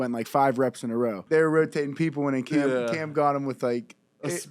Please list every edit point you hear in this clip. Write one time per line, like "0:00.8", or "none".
0:01.2